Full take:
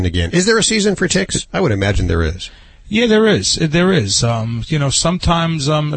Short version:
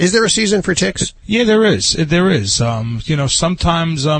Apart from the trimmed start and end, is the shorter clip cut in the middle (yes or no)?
yes